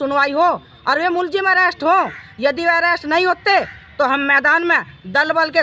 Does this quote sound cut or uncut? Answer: uncut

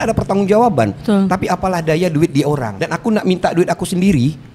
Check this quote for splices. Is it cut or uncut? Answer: cut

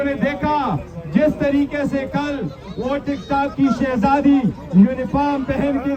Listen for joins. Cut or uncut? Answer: uncut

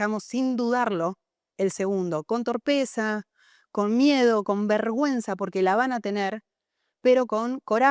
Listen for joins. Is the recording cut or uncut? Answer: uncut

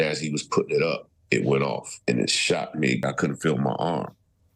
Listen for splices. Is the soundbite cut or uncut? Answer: cut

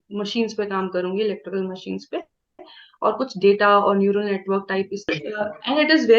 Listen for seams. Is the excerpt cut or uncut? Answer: cut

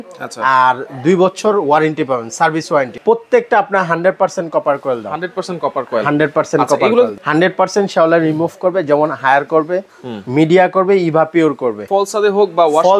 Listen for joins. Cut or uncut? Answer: cut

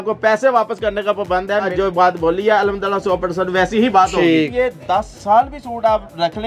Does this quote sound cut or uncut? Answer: cut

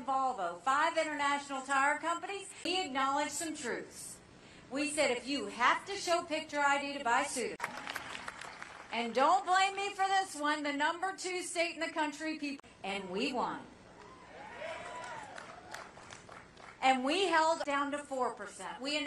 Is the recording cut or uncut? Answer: uncut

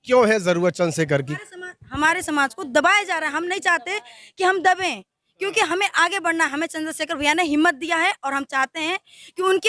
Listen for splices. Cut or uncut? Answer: cut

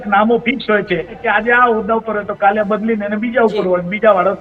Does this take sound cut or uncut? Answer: cut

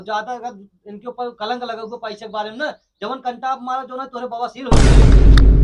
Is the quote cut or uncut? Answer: cut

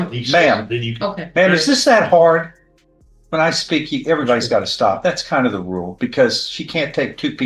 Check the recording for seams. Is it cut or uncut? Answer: uncut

